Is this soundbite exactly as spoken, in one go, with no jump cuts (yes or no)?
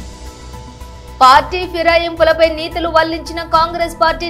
no